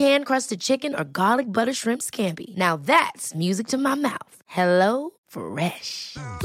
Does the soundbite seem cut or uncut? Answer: uncut